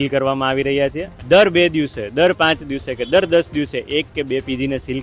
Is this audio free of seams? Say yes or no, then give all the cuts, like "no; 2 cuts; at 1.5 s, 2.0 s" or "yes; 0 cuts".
no; 1 cut; at 1.1 s